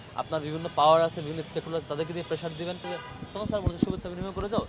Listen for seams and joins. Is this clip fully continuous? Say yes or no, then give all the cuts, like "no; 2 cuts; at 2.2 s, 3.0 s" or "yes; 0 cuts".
no; 1 cut; at 2.8 s